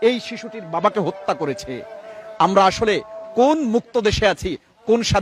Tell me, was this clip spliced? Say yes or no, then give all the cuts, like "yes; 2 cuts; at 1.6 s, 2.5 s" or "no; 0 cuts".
no; 0 cuts